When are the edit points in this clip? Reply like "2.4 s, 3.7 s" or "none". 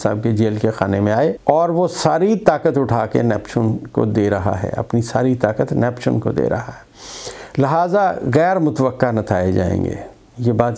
1.4 s